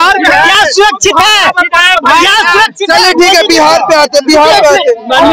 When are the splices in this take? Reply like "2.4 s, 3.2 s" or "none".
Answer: none

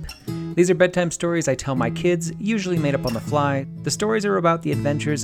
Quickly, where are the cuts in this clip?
3.7 s

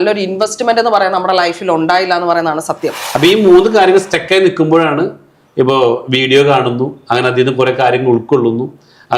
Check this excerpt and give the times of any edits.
3.0 s

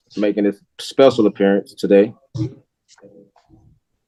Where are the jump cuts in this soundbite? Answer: none

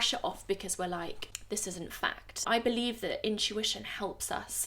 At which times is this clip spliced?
1.3 s

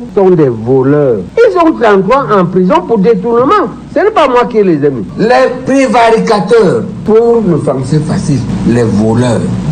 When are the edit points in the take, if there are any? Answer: 1.2 s, 5.0 s

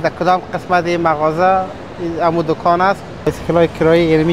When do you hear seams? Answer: 3.3 s

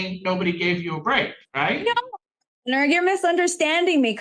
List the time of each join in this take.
1.4 s

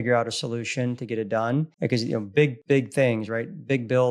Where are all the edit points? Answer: 1.7 s, 2.6 s

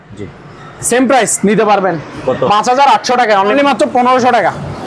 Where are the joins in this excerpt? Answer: 3.4 s

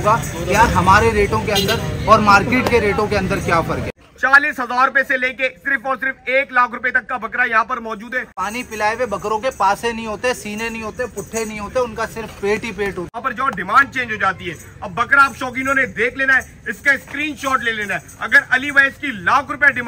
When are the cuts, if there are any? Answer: 3.8 s, 8.4 s, 13.1 s

